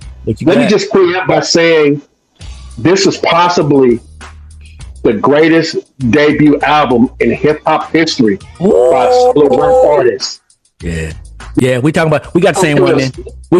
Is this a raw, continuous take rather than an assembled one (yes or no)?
no